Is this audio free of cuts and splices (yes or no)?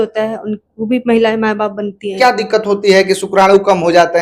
no